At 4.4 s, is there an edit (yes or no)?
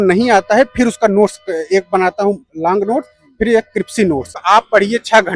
yes